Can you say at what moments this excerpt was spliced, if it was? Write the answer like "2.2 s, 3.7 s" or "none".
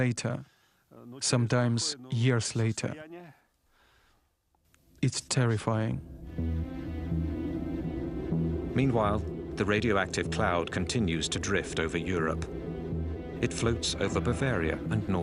3.5 s